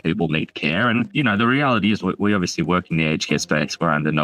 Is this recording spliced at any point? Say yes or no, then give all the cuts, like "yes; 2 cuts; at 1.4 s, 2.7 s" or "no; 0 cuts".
yes; 1 cut; at 1.1 s